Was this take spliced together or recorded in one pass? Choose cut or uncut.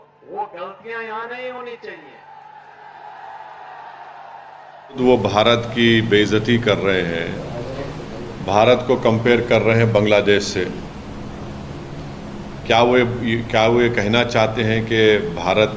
cut